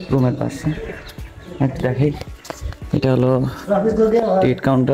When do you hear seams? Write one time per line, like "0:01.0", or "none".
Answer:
none